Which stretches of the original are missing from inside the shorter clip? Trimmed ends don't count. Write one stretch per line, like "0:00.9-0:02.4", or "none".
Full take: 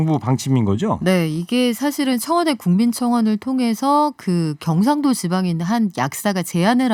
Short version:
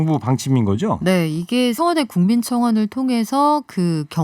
0:01.8-0:02.3